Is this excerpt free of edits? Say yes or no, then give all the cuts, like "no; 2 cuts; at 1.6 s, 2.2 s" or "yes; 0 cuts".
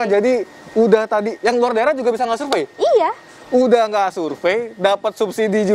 yes; 0 cuts